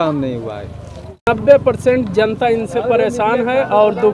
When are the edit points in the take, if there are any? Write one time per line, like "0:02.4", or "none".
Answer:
0:01.3